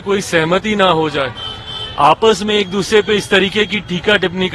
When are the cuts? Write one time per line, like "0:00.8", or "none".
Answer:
none